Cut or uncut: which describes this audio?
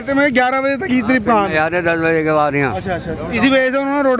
uncut